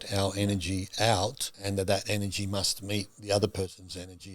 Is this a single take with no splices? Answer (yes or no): no